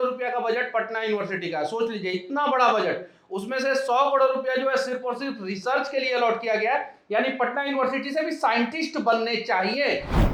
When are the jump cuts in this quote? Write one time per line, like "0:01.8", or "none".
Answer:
none